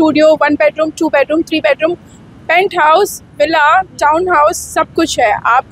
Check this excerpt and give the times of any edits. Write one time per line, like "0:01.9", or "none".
none